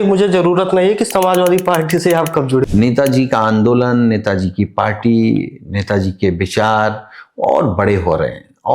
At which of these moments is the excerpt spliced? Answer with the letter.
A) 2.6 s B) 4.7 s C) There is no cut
A